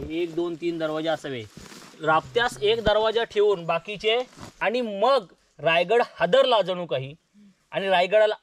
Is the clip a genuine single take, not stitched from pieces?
no; 1 cut; at 4.4 s

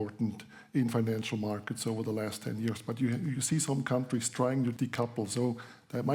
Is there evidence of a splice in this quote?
yes; 1 cut; at 4.8 s

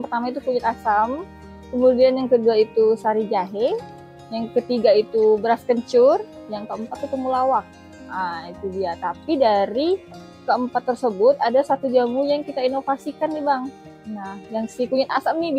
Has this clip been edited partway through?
no; 0 cuts

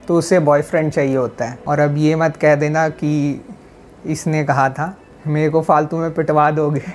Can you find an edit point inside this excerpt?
yes; 2 cuts; at 1.5 s, 5.1 s

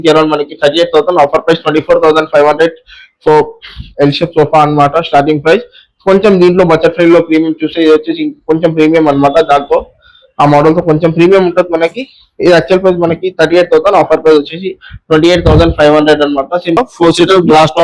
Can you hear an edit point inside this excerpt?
yes; 1 cut; at 16.8 s

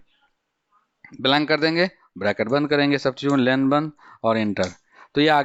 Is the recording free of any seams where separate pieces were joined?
yes; 0 cuts

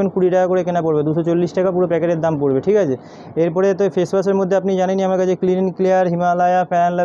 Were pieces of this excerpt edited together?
no; 0 cuts

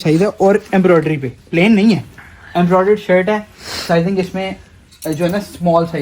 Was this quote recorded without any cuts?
yes; 0 cuts

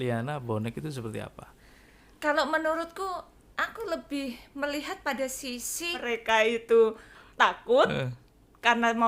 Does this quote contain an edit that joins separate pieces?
yes; 1 cut; at 5.9 s

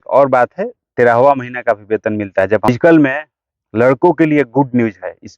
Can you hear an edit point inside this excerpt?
yes; 1 cut; at 2.7 s

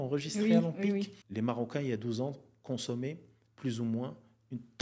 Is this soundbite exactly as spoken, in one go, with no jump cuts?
no; 1 cut; at 1.2 s

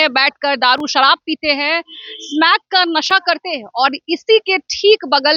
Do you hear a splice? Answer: no; 0 cuts

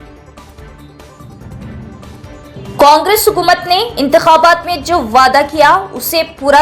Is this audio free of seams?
no; 1 cut; at 1.0 s

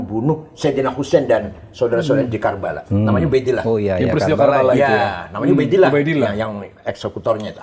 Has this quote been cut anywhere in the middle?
no; 0 cuts

